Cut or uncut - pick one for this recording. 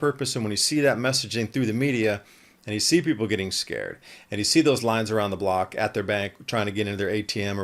uncut